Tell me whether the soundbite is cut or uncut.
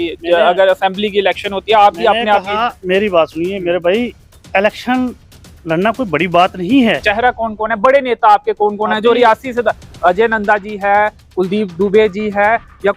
cut